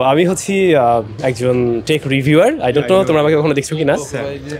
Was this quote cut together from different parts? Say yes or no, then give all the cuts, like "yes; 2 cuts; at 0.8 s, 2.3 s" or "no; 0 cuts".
no; 0 cuts